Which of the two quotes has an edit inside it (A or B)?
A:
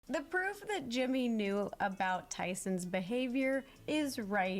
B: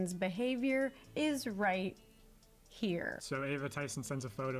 B